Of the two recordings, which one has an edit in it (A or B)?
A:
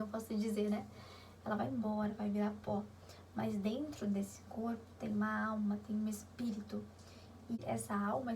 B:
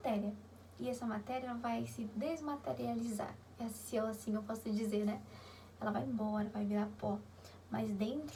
A